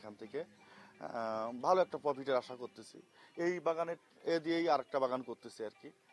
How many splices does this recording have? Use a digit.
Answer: 0